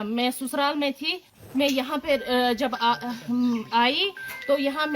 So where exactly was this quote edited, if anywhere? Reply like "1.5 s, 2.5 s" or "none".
1.3 s